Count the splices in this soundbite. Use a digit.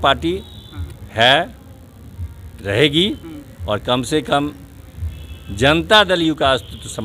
0